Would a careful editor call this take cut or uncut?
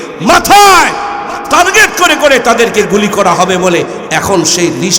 uncut